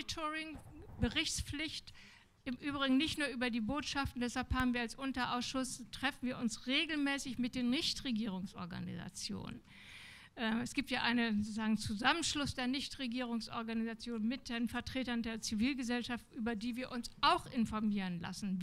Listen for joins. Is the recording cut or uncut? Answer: uncut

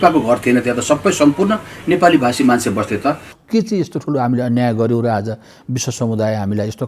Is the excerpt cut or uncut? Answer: cut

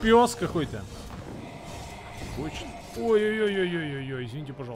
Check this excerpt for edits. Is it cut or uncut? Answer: uncut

